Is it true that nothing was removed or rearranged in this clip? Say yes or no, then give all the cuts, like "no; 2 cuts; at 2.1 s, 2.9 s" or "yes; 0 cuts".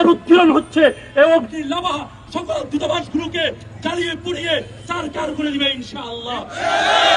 yes; 0 cuts